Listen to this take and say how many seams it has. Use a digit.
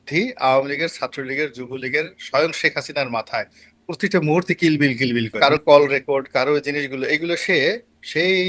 1